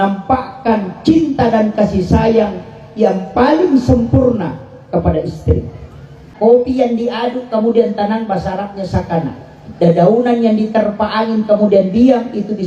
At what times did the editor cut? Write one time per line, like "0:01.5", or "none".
0:06.2